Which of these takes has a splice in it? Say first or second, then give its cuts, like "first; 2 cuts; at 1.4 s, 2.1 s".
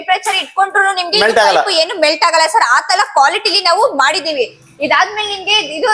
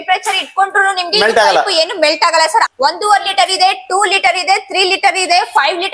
second; 1 cut; at 2.7 s